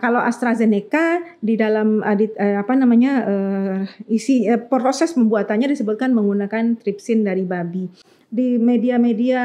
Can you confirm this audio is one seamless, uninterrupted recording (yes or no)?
no